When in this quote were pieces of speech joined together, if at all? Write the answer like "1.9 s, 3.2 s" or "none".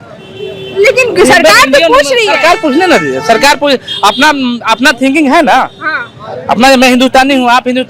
none